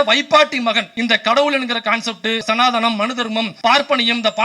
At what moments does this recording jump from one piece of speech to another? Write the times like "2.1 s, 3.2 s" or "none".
0.9 s, 2.4 s, 3.5 s

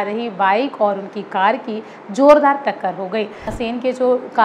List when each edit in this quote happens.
3.5 s

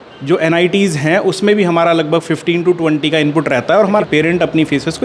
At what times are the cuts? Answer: 4.0 s

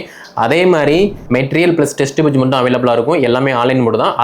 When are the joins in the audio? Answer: 1.2 s

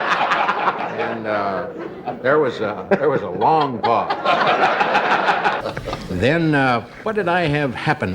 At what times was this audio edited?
5.6 s

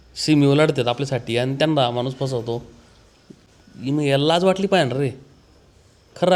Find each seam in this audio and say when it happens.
none

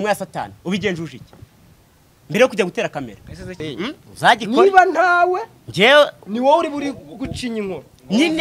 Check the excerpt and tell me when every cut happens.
3.4 s

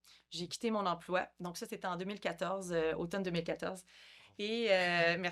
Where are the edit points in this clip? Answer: none

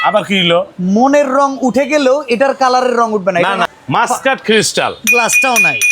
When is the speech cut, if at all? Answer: 3.6 s

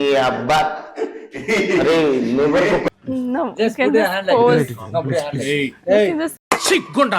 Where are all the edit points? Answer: 2.9 s

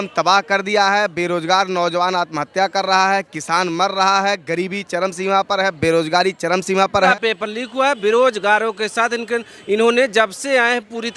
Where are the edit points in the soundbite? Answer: 7.1 s

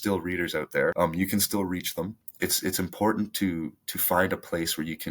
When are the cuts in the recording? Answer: 0.9 s, 2.2 s

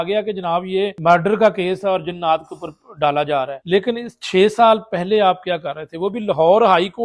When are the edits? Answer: 1.0 s, 3.6 s

